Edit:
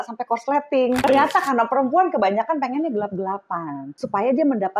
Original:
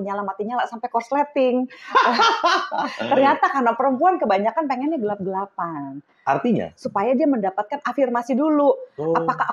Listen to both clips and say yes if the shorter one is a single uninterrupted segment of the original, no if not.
no